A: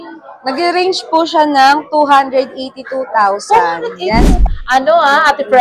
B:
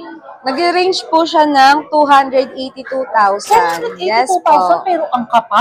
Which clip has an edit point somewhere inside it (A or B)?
A